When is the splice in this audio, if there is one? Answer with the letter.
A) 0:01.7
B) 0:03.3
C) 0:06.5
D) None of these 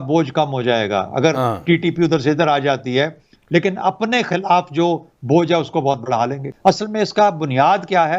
C